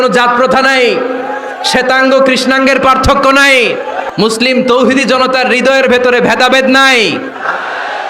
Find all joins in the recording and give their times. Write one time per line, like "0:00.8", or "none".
0:04.0